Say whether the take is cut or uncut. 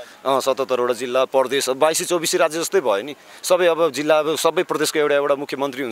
uncut